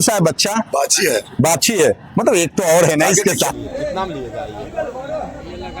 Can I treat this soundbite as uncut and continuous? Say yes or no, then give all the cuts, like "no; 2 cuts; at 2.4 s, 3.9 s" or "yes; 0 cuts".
no; 1 cut; at 3.5 s